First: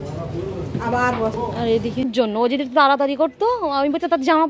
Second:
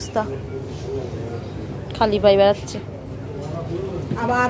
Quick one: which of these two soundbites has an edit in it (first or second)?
first